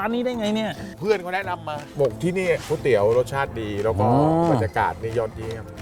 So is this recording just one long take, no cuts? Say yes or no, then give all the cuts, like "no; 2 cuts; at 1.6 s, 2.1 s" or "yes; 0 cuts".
no; 2 cuts; at 0.9 s, 2.6 s